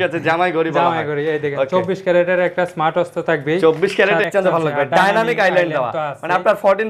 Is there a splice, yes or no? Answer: yes